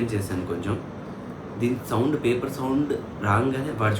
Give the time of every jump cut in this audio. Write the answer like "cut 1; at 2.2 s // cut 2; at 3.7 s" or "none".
none